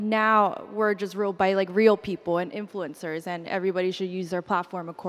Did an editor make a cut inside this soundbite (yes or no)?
no